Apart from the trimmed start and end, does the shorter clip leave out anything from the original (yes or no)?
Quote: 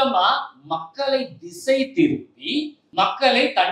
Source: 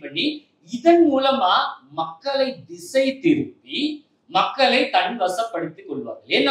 yes